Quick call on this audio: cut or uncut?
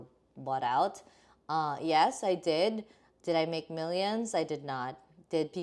uncut